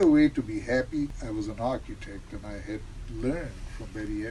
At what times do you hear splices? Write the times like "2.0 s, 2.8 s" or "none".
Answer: 1.1 s